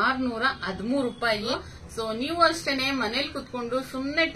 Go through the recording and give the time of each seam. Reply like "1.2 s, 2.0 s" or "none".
1.5 s